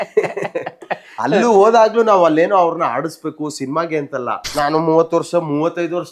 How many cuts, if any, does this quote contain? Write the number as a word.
one